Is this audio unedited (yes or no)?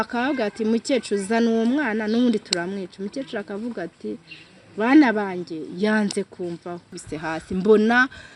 no